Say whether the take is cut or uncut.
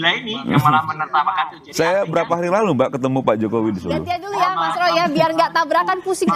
cut